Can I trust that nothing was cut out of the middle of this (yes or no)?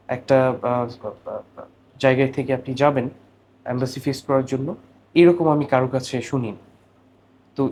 yes